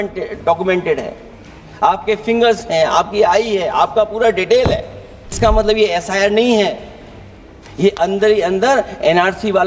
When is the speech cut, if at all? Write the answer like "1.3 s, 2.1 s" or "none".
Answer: 5.4 s